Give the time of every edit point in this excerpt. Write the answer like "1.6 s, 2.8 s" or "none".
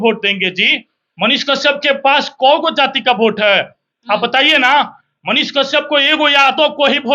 none